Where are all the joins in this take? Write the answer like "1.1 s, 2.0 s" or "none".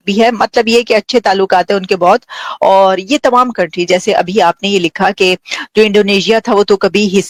none